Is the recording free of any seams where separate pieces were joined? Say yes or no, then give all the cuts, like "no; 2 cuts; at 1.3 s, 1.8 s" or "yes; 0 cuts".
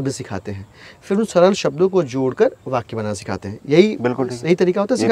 yes; 0 cuts